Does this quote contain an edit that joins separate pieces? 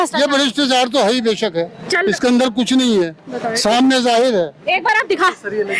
no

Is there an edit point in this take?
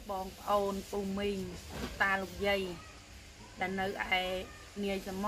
no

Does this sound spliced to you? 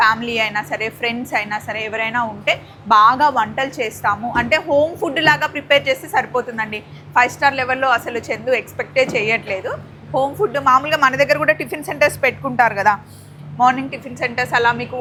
no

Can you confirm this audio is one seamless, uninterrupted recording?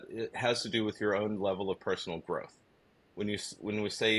yes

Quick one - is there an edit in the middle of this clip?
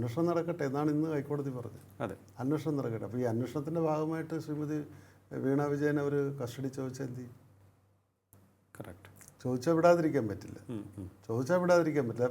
no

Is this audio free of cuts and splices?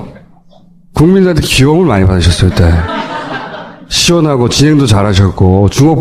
no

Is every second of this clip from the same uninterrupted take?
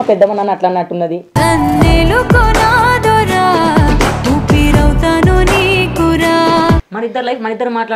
no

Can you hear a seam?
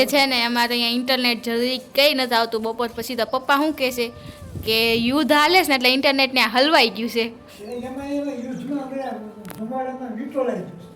no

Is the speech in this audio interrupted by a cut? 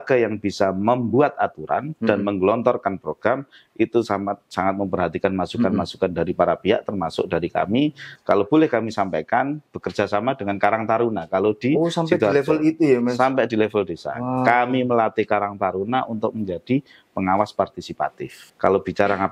yes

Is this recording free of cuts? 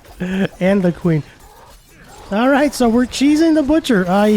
no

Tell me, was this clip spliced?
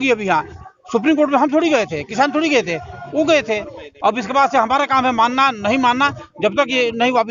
no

